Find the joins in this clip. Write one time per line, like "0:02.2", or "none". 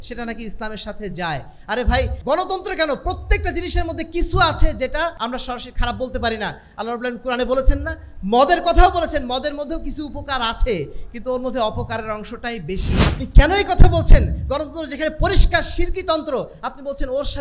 0:02.2
0:05.2
0:13.0